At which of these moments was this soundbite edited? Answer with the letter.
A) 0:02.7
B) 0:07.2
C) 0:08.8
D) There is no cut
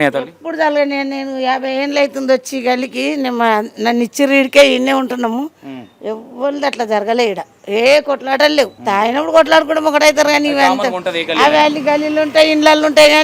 C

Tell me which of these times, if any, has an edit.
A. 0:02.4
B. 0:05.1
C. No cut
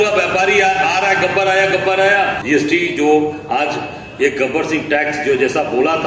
A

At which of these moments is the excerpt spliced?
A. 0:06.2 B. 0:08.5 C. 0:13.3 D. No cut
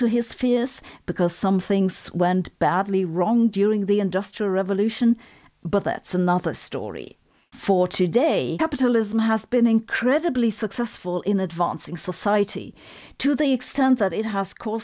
B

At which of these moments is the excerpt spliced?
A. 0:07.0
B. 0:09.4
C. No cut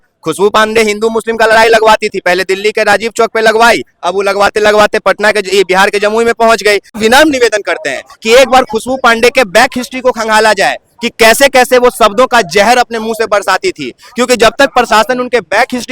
A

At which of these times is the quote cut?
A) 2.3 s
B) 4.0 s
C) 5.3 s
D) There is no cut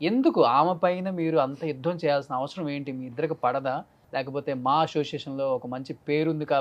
B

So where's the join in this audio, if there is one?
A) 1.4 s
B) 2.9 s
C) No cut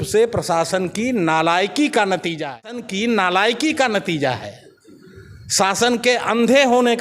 B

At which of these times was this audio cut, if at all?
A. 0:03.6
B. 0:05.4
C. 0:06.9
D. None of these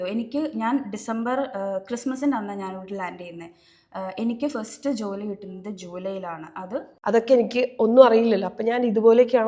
C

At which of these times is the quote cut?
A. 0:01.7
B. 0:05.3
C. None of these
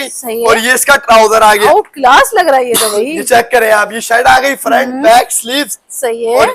A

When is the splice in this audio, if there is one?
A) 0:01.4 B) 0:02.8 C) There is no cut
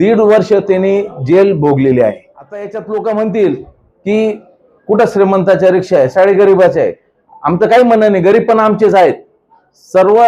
B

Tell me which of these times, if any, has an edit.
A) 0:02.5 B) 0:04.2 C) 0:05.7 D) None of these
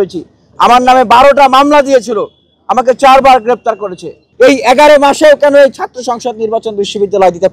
B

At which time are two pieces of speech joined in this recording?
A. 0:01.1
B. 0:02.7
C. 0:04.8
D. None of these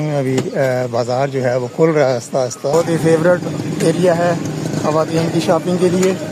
B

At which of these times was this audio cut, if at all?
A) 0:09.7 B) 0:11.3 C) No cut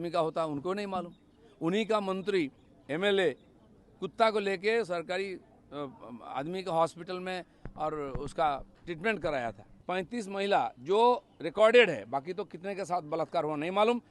A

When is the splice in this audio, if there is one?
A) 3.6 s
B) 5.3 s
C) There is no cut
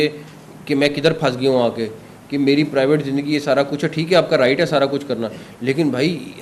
C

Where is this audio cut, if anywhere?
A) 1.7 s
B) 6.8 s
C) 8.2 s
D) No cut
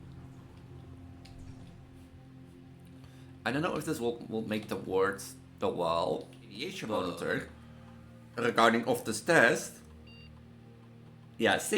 B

